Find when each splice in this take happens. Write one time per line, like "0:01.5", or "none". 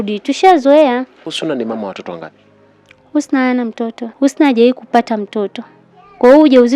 none